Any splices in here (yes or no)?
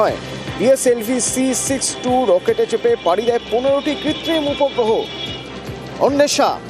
no